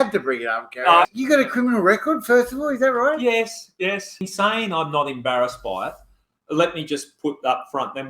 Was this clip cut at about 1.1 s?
yes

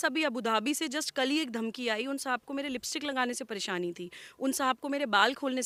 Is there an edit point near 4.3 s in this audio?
no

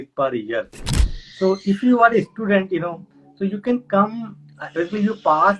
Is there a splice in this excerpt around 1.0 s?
yes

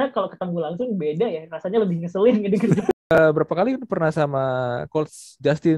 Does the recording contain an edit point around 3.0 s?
yes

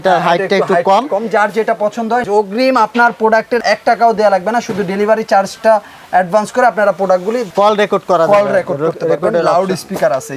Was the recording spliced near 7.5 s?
yes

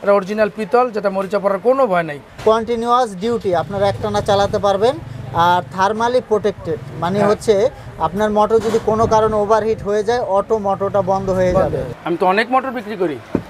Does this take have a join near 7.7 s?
no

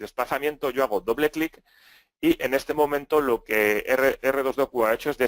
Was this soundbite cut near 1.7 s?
yes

